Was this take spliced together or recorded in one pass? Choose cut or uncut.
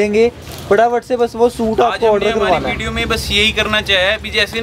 uncut